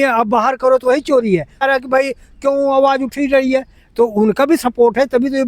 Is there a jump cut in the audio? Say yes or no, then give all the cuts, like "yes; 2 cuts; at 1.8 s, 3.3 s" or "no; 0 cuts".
yes; 1 cut; at 1.6 s